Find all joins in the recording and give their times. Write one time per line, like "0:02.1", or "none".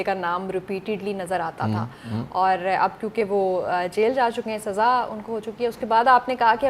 none